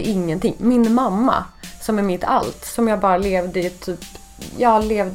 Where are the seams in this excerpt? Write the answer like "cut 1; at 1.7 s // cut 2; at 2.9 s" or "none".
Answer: none